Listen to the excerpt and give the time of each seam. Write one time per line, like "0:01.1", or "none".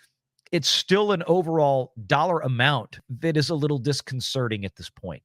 0:03.0